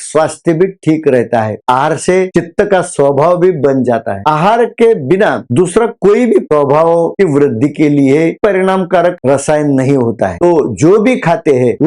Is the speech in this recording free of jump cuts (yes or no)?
no